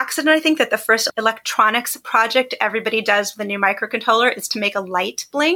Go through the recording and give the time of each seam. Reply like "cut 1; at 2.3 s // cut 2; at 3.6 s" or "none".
cut 1; at 1.1 s